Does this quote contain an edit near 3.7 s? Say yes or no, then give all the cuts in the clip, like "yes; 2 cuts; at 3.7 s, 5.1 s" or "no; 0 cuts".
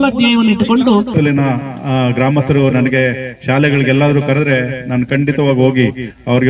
no; 1 cut; at 1.1 s